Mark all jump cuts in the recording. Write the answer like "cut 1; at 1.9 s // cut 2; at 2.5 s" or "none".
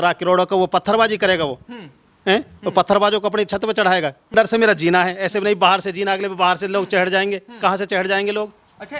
cut 1; at 4.3 s